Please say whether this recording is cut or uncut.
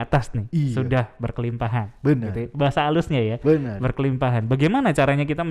uncut